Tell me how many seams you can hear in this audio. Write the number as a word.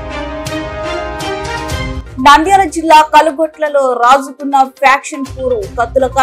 one